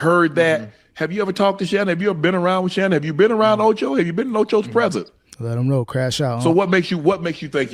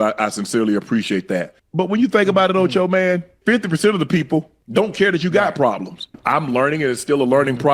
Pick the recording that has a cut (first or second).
second